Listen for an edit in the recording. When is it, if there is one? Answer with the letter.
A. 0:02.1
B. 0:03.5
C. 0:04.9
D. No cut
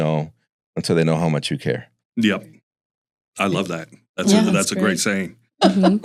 D